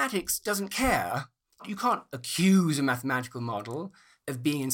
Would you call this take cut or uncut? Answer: cut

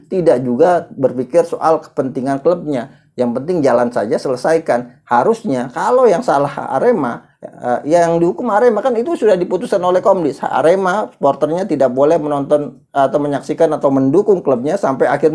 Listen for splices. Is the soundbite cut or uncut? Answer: uncut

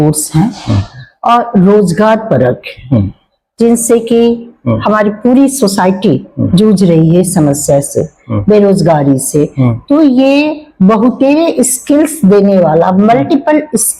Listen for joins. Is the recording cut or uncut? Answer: uncut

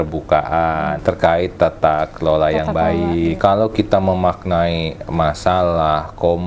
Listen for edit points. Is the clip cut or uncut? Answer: cut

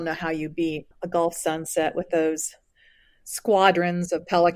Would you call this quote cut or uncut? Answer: cut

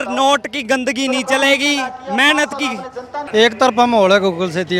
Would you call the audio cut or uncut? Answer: cut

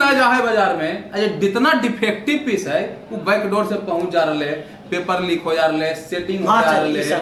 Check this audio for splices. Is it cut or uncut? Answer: uncut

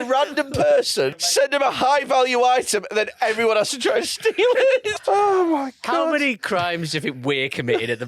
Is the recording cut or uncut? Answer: cut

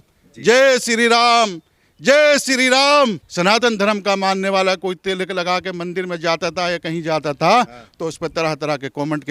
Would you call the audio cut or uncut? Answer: cut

